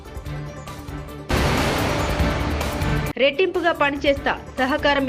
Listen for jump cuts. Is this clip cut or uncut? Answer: cut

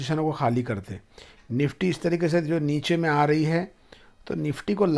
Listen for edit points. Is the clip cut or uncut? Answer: uncut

